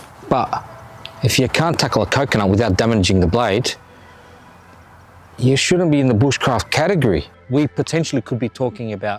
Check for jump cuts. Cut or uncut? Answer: cut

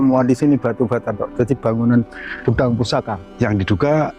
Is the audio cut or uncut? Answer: cut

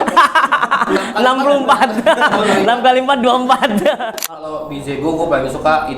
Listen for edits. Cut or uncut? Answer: cut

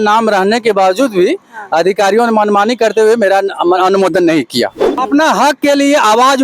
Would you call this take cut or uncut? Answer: cut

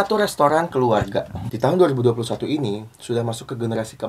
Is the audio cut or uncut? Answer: cut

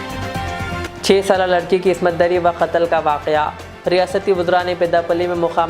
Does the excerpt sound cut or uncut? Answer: cut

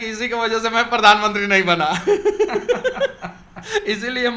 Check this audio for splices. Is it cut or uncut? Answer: uncut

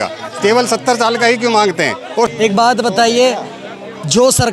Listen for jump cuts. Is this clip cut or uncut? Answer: cut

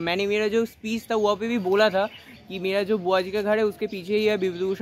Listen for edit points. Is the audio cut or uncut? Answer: uncut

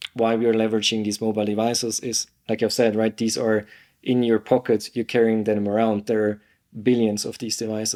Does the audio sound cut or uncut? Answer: uncut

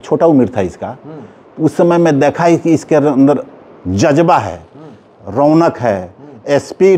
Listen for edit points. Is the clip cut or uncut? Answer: uncut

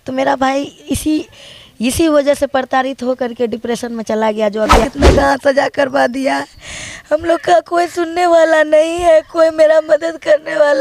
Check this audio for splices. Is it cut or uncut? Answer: cut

